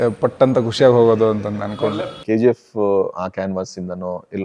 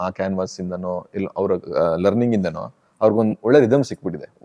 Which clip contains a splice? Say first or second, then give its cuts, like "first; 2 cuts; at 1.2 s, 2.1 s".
first; 1 cut; at 2.1 s